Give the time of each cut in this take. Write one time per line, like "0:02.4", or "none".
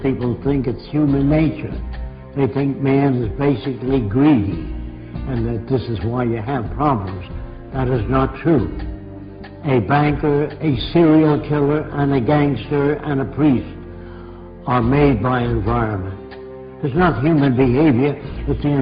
0:11.9